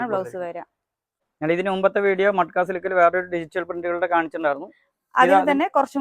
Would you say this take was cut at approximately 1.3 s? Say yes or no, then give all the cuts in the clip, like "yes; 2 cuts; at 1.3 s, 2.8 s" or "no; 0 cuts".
yes; 1 cut; at 1.3 s